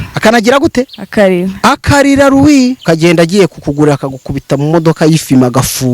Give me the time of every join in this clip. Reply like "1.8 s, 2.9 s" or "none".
2.8 s